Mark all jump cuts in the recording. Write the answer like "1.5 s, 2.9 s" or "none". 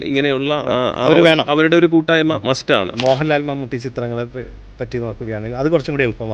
2.9 s